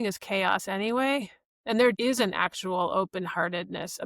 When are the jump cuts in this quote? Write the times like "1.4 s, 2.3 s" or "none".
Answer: 2.0 s